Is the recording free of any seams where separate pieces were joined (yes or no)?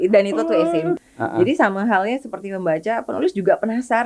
no